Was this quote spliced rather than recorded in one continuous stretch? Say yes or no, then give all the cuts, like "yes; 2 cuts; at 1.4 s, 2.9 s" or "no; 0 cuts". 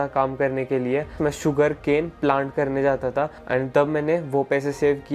no; 0 cuts